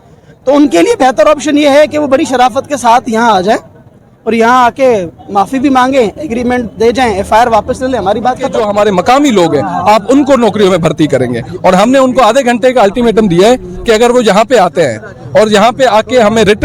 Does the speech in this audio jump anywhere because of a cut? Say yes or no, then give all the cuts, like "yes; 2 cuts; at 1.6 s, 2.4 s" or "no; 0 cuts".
yes; 1 cut; at 8.6 s